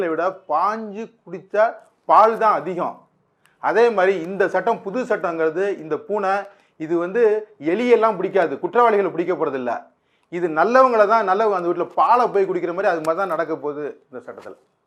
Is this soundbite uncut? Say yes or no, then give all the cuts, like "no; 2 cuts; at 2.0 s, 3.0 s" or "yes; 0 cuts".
yes; 0 cuts